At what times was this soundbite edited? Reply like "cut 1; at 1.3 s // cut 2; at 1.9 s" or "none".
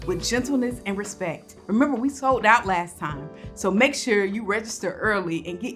none